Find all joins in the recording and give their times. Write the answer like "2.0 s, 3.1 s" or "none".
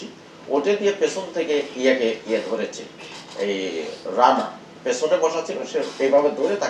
none